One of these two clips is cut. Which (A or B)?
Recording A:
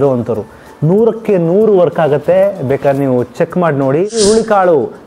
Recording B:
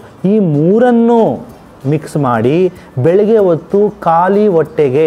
A